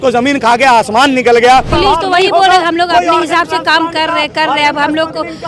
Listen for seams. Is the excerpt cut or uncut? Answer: cut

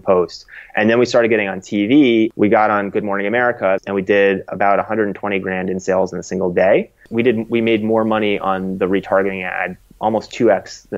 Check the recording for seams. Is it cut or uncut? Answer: cut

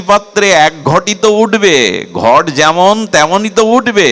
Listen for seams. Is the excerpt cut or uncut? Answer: uncut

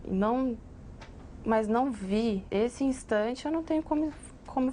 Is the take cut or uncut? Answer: cut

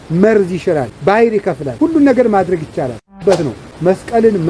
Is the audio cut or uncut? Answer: cut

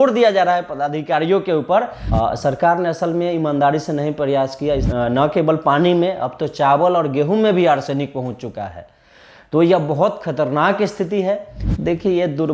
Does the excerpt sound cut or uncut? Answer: cut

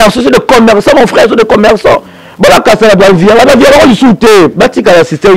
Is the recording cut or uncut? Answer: uncut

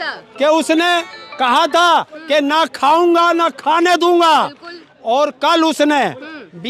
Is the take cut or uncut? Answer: uncut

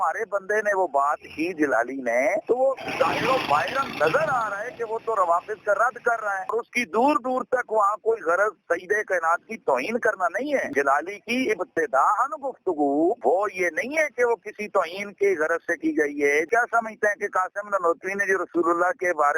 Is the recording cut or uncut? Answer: cut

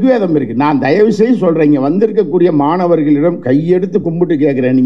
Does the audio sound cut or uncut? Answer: uncut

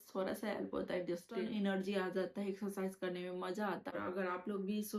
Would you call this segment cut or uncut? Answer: cut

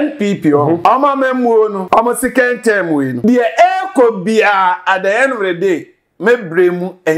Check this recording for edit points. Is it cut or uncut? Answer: cut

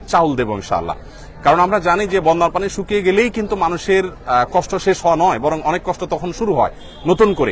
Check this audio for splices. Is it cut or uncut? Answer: uncut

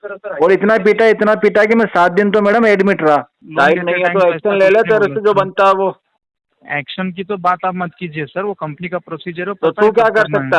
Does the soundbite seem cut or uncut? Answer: cut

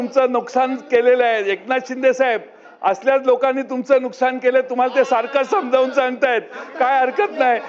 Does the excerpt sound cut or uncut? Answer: uncut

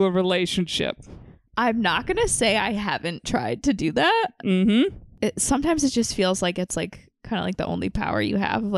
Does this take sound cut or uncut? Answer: cut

